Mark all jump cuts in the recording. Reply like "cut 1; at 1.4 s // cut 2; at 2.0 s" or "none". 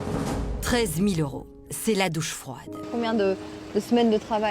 cut 1; at 2.8 s